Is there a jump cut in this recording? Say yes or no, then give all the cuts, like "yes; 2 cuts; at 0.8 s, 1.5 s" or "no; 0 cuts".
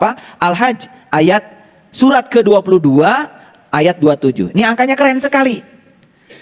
no; 0 cuts